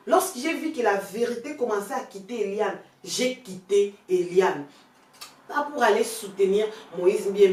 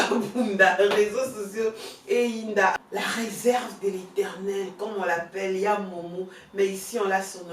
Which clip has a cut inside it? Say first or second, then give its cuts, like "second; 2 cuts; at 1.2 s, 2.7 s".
second; 1 cut; at 2.7 s